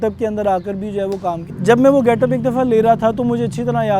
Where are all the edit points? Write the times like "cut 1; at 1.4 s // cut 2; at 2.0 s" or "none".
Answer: none